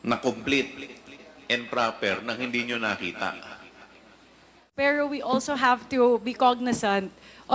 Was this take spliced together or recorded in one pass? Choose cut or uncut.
cut